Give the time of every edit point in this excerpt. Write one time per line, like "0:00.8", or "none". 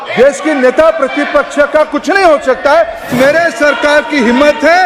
0:03.1